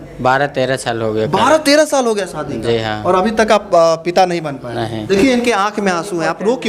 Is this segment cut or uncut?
cut